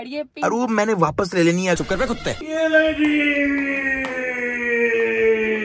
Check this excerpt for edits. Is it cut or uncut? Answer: cut